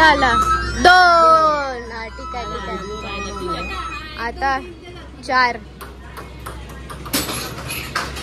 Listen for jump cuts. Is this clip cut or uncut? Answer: uncut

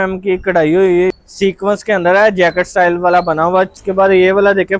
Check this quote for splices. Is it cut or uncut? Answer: cut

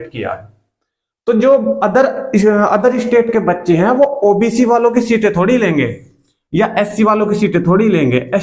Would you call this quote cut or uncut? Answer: uncut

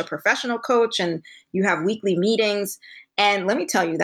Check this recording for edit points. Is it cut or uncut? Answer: uncut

